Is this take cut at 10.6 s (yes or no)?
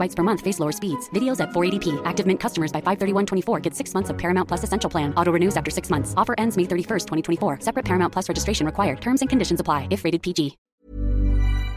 yes